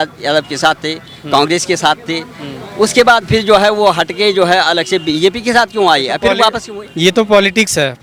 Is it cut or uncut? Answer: uncut